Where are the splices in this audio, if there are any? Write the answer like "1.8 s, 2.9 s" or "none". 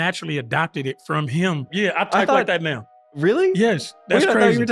1.7 s